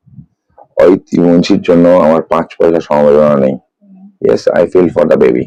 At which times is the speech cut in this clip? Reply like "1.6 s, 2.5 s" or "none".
none